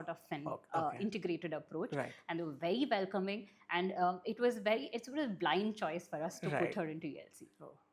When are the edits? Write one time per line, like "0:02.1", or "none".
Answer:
none